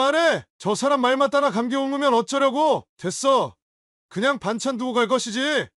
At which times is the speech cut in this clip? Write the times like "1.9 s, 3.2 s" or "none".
none